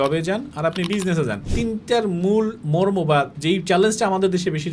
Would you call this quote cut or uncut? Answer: cut